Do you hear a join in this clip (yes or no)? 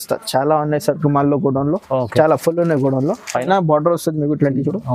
yes